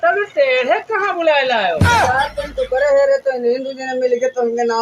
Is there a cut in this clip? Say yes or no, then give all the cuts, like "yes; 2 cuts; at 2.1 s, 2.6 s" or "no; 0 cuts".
no; 0 cuts